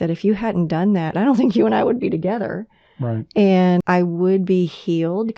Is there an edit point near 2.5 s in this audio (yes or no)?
no